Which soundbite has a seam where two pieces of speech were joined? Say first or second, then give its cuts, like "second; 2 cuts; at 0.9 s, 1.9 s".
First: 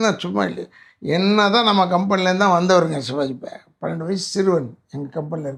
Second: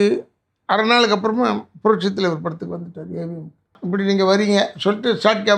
second; 1 cut; at 3.8 s